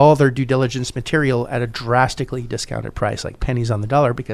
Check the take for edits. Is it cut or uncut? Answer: uncut